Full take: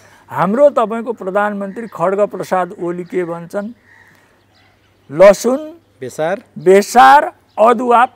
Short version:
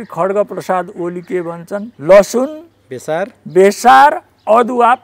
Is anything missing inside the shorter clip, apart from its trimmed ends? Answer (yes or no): yes